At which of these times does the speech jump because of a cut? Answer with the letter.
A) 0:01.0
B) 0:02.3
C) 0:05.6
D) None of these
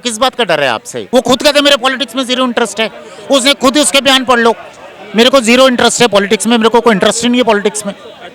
A